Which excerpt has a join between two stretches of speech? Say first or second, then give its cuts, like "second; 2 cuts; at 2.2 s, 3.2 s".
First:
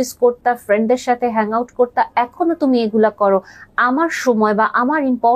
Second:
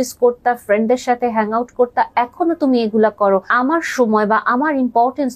second; 1 cut; at 3.5 s